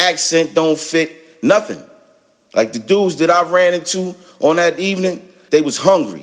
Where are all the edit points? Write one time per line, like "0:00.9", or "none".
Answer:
0:05.3